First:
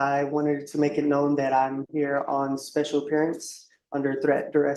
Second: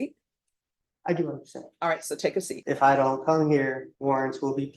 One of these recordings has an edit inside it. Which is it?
second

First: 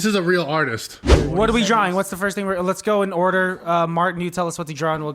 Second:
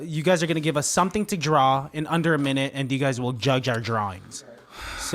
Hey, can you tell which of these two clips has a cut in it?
first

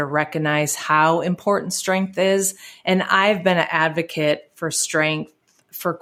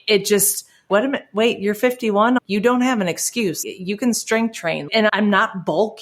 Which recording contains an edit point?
second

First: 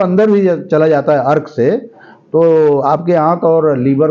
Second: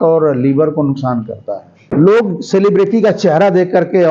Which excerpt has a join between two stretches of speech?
second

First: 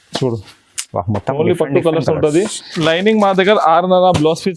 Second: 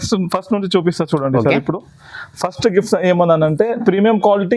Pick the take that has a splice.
first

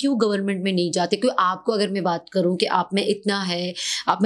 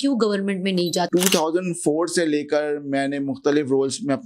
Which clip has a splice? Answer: second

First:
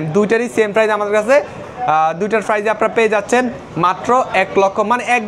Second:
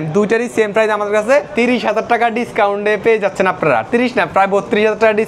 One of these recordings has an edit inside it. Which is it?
second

